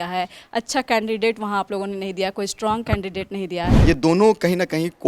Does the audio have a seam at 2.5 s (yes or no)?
no